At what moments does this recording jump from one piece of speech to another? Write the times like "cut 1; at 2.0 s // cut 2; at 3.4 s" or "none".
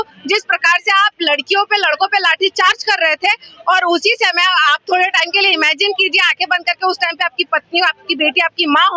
none